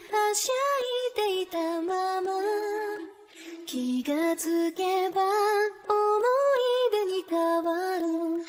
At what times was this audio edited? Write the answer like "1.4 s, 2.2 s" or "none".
none